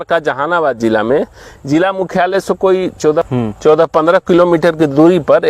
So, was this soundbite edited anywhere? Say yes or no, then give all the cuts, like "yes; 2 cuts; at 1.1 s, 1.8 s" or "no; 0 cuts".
no; 0 cuts